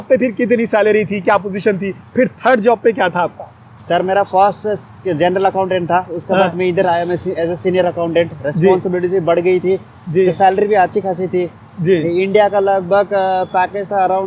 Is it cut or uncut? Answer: uncut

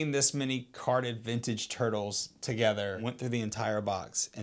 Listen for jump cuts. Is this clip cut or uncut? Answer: cut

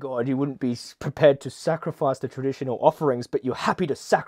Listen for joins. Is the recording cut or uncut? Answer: uncut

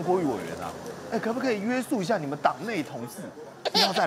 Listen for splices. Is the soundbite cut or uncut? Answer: uncut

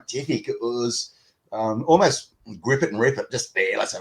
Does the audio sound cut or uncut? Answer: uncut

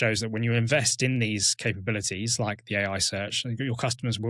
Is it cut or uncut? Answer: uncut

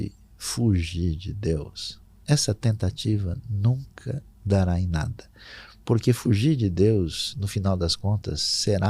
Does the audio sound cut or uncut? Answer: uncut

